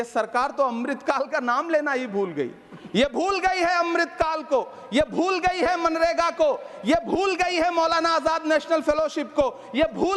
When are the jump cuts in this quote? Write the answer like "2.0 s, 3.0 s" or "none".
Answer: none